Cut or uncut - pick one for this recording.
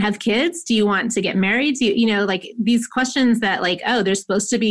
uncut